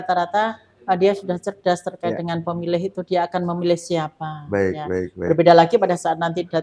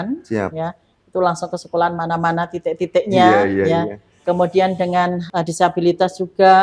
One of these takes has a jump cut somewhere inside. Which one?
second; 1 cut; at 5.2 s

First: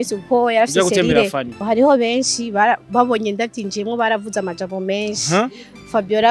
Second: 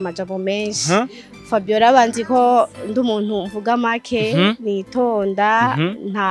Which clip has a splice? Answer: first; 1 cut; at 1.6 s

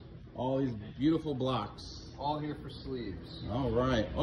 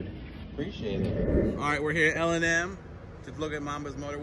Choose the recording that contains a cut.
second; 1 cut; at 1.3 s

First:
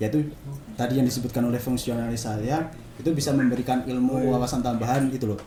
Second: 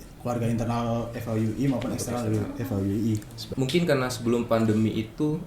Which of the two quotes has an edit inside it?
second; 1 cut; at 3.4 s

